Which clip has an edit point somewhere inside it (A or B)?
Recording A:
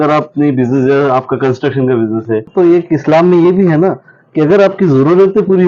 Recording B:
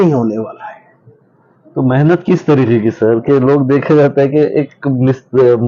A